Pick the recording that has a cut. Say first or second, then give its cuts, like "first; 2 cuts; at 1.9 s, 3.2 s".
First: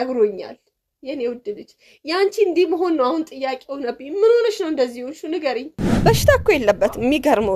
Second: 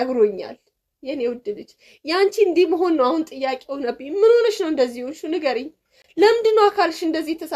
first; 1 cut; at 6.0 s